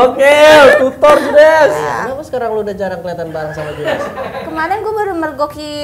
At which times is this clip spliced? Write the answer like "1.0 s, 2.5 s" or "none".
1.8 s, 4.4 s